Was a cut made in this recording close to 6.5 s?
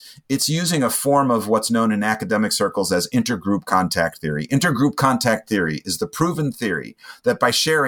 no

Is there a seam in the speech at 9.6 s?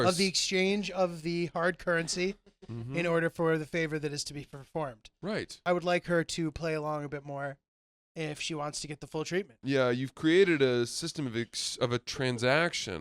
yes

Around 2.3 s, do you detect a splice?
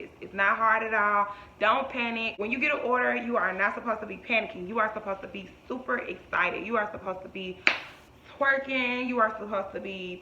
yes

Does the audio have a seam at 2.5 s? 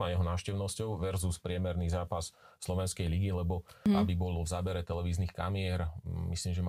no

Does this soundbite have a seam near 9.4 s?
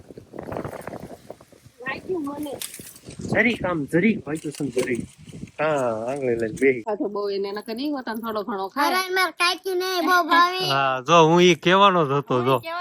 no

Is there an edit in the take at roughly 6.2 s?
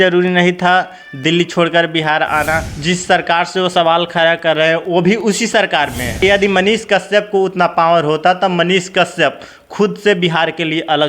yes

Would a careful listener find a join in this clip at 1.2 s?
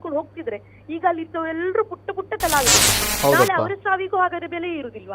no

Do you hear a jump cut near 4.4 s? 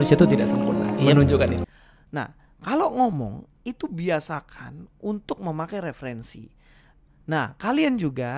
no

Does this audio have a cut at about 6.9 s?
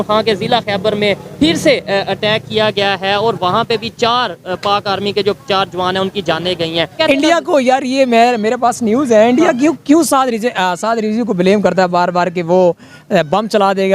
yes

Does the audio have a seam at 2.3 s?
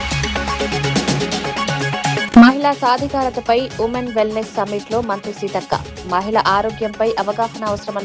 yes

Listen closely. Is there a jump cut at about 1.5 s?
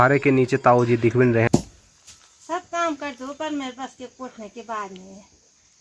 yes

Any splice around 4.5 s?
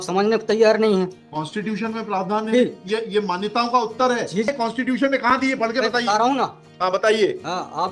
yes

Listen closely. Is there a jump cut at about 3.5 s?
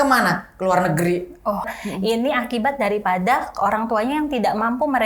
no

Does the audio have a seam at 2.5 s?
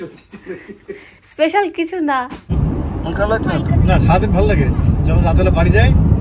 yes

